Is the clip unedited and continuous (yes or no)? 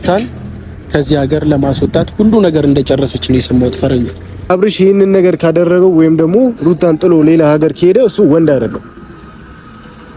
no